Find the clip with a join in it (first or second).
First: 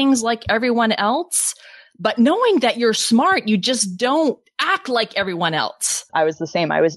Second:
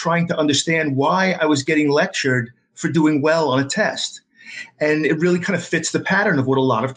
first